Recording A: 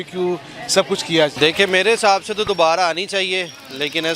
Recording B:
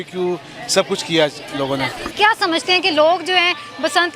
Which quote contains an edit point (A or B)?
A